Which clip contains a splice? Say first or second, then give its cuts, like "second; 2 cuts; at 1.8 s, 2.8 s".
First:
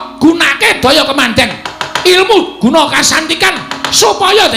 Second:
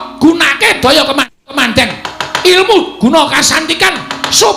first; 1 cut; at 1.2 s